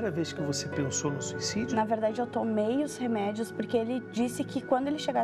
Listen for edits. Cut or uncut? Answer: cut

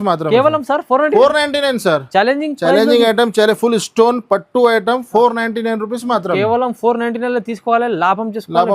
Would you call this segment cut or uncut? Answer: uncut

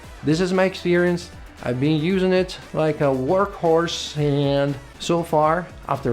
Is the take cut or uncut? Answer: uncut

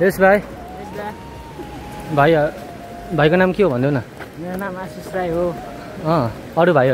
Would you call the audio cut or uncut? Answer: uncut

